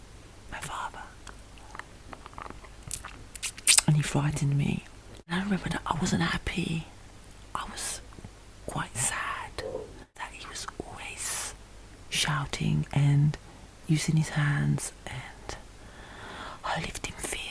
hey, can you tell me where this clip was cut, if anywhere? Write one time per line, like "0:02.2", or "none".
0:05.3
0:10.2